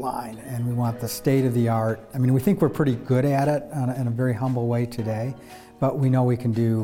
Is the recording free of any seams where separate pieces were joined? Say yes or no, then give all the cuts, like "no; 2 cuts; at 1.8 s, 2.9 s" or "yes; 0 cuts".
no; 1 cut; at 1.1 s